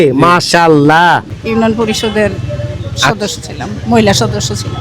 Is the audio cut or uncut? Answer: cut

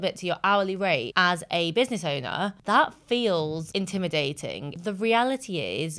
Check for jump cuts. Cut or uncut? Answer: cut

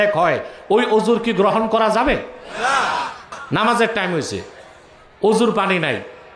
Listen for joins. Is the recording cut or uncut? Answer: cut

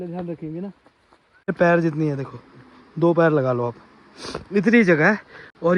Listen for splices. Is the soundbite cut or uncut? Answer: cut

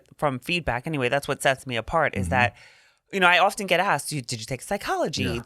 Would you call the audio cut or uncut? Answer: uncut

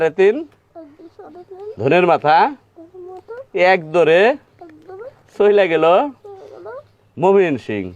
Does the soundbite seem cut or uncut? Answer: uncut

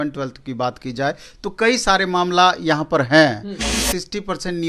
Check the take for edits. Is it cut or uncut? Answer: cut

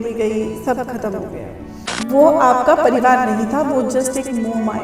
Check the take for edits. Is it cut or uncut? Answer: cut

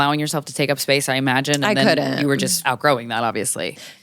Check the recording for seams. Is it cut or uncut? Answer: cut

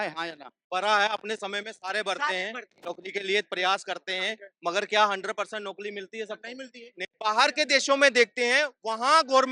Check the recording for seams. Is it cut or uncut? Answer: cut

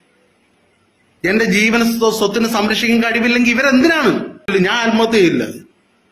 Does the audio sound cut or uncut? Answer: cut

